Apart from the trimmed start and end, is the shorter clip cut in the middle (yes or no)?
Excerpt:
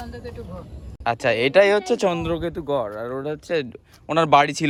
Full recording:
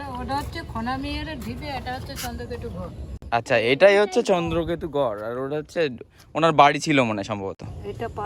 no